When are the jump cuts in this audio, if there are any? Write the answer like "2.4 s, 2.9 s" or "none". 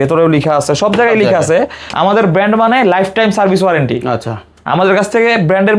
1.9 s